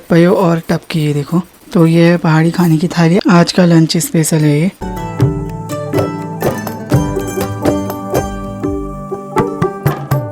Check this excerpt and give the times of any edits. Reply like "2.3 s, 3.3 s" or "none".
none